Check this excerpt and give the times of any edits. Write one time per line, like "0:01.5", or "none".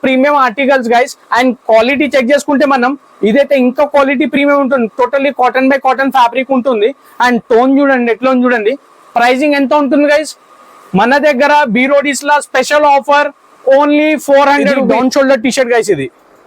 0:14.9